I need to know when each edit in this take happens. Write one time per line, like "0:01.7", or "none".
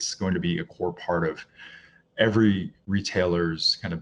none